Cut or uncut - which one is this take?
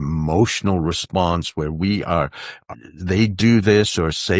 cut